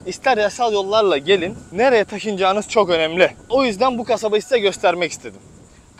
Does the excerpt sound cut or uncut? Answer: cut